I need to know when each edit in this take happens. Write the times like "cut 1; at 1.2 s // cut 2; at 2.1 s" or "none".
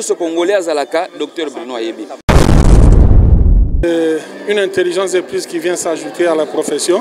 cut 1; at 2.2 s // cut 2; at 3.8 s